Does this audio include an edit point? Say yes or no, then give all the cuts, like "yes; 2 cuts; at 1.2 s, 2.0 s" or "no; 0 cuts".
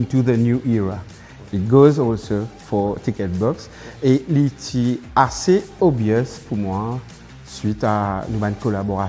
no; 0 cuts